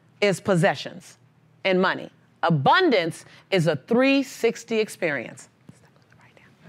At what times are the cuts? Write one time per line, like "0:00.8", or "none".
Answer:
none